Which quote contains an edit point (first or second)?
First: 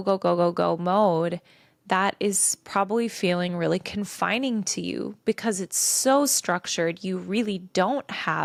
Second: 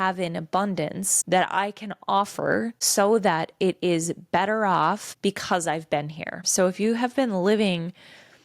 second